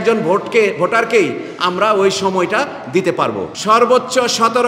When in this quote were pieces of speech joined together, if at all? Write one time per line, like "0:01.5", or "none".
0:03.5